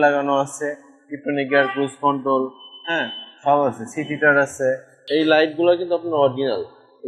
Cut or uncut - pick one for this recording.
cut